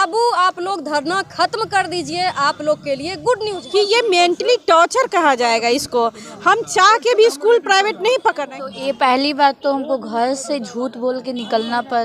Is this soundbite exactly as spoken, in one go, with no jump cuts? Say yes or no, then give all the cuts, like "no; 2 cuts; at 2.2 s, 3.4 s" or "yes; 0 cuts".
no; 2 cuts; at 3.6 s, 8.5 s